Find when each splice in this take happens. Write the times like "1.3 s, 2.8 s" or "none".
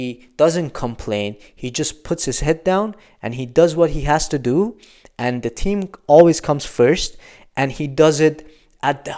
none